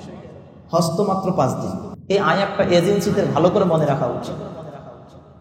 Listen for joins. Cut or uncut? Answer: cut